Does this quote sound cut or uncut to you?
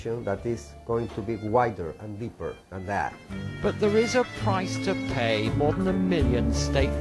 cut